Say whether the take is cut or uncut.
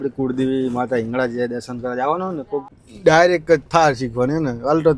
cut